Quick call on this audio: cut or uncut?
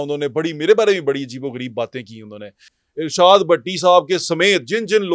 cut